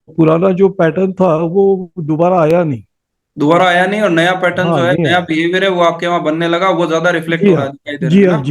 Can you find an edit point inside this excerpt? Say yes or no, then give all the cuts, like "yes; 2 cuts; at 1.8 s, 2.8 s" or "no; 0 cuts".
no; 0 cuts